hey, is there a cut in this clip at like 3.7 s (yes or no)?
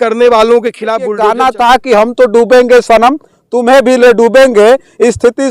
no